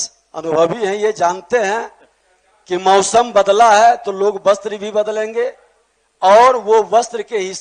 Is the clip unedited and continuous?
yes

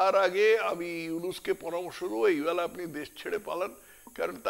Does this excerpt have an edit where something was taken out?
no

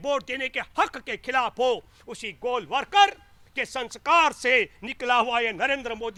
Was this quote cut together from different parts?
no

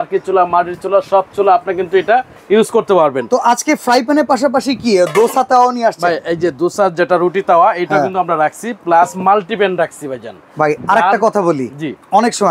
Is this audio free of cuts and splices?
yes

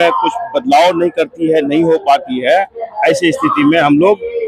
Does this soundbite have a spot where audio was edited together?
no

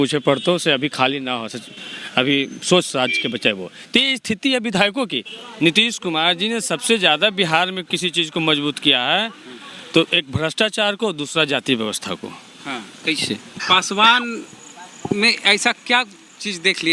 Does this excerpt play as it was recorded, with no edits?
no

